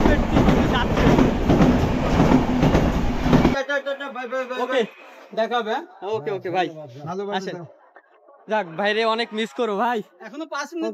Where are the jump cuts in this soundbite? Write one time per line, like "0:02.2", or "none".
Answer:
0:03.5